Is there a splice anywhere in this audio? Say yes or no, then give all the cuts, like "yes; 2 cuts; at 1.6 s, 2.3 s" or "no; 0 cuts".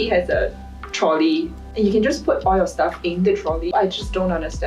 yes; 2 cuts; at 1.6 s, 3.7 s